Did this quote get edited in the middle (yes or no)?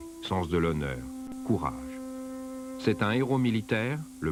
no